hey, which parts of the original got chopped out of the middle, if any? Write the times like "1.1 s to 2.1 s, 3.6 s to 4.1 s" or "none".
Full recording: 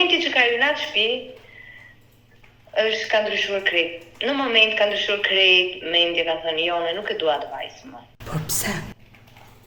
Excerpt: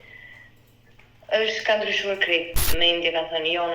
4.1 s to 5.8 s